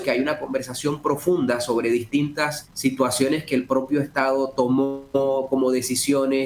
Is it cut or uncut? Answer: cut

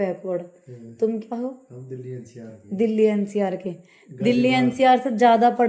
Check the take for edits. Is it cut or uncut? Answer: uncut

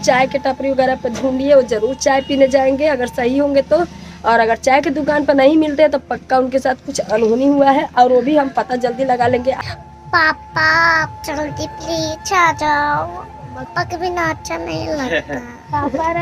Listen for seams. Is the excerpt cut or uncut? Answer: cut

